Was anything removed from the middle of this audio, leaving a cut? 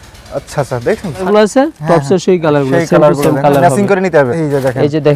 yes; 2 cuts; at 1.2 s, 4.4 s

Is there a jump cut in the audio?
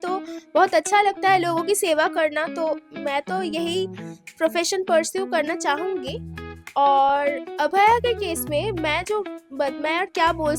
no; 0 cuts

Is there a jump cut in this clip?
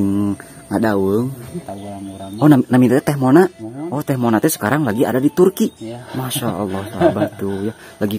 yes; 1 cut; at 1.8 s

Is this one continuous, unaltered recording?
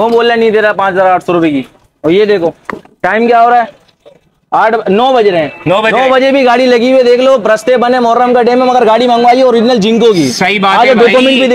yes; 0 cuts

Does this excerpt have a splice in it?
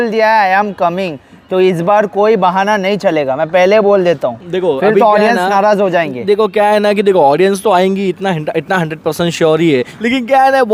no; 0 cuts

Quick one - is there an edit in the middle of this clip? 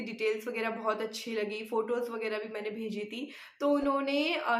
no; 0 cuts

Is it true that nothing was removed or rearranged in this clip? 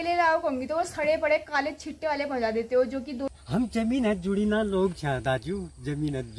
no; 1 cut; at 3.3 s

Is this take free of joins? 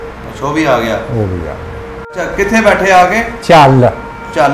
no; 1 cut; at 2.1 s

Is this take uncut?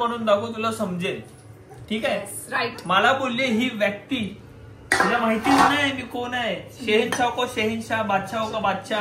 yes; 0 cuts

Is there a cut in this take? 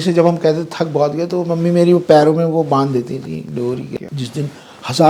yes; 1 cut; at 3.9 s

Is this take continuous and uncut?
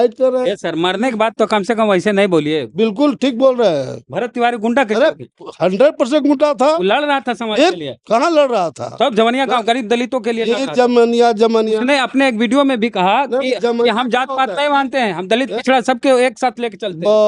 yes; 0 cuts

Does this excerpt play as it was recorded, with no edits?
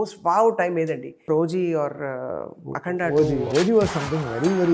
no; 2 cuts; at 1.3 s, 3.5 s

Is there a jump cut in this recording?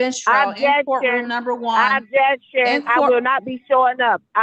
no; 0 cuts

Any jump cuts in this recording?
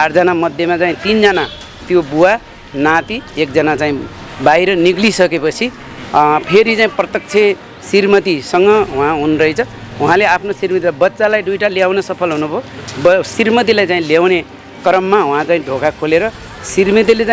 no; 0 cuts

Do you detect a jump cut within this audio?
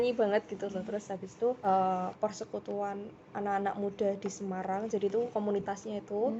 yes; 1 cut; at 1.6 s

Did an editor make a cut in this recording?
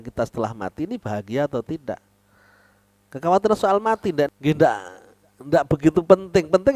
yes; 1 cut; at 4.4 s

